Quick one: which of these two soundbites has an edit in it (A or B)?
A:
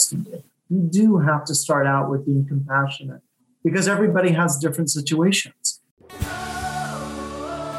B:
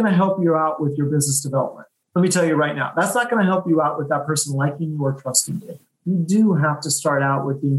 A